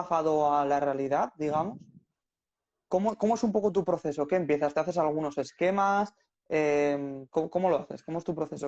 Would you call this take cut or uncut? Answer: uncut